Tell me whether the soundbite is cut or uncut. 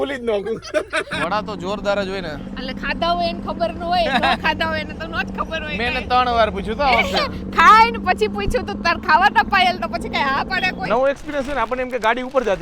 cut